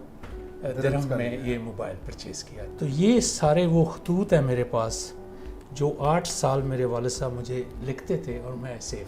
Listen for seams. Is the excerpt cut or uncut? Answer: cut